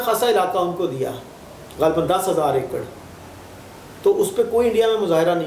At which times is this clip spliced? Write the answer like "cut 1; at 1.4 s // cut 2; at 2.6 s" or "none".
none